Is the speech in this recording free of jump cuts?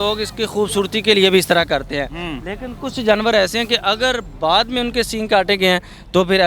yes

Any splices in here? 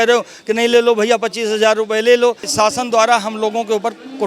yes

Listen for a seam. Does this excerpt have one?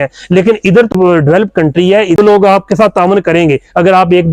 yes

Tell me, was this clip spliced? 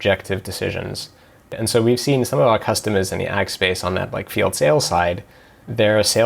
yes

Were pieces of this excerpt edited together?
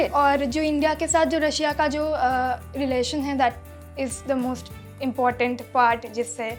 no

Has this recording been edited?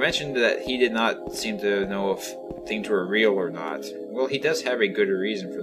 yes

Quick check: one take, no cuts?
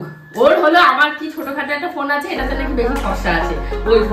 yes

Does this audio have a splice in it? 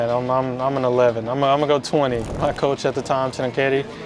yes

